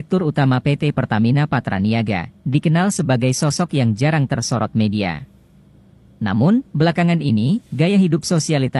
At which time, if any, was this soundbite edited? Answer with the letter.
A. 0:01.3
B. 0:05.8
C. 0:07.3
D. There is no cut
D